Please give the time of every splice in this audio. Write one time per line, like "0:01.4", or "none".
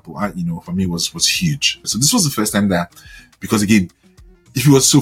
0:01.8